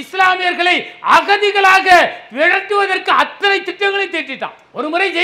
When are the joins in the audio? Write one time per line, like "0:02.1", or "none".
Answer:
none